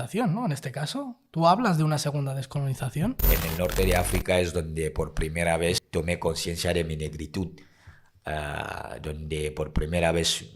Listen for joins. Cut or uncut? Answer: cut